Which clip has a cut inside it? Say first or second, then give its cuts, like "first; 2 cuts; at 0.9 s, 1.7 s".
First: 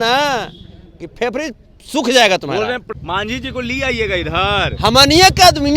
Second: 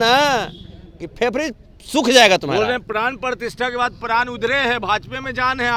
first; 1 cut; at 2.9 s